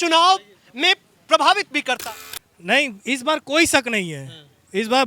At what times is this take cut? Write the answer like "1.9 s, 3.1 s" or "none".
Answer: 2.0 s